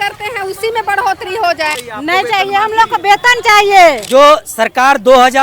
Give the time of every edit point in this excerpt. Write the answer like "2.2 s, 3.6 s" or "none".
1.9 s, 4.0 s